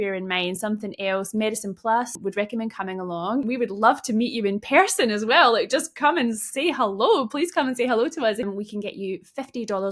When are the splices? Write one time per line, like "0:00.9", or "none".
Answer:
0:02.2
0:03.4
0:08.5